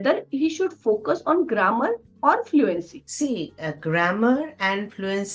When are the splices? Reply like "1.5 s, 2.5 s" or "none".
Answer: none